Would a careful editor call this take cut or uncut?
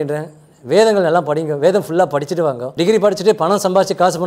cut